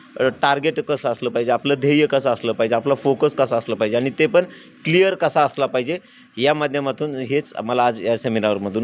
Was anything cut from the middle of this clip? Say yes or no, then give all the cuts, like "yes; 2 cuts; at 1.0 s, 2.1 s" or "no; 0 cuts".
no; 0 cuts